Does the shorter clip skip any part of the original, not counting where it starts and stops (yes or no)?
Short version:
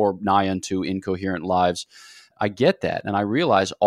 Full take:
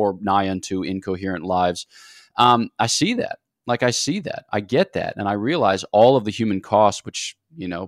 yes